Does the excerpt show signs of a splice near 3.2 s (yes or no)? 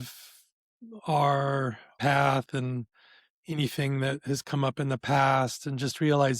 no